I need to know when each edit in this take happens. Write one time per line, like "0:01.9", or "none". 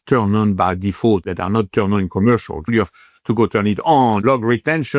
0:01.3
0:02.7
0:04.2